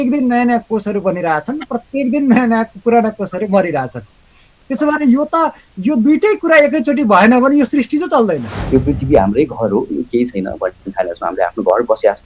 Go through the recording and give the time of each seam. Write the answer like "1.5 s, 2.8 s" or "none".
8.5 s